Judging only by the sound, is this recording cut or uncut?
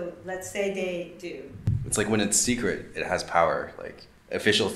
cut